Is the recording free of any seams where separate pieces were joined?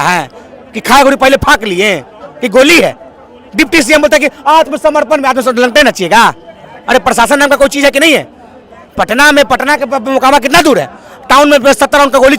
yes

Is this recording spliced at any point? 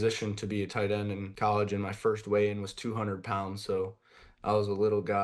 yes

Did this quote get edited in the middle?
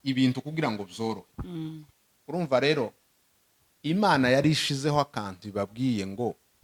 no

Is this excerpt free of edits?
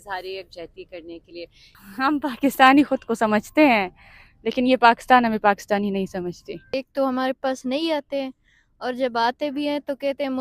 no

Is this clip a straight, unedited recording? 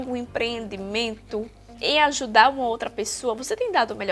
no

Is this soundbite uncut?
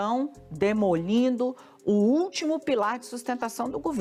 yes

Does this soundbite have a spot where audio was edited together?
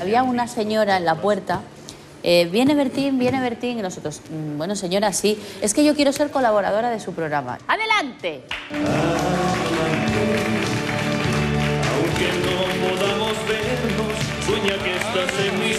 yes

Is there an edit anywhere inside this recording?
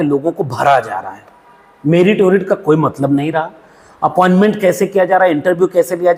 no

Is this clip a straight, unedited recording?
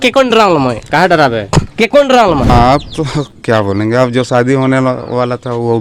no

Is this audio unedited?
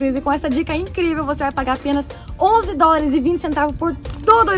yes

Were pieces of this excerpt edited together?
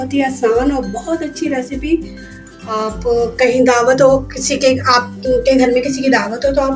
no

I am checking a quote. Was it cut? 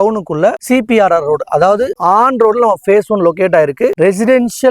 yes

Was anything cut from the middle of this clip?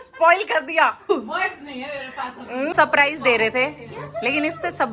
yes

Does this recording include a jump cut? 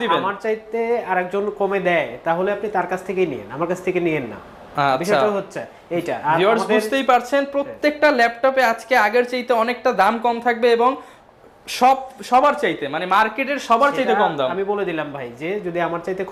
no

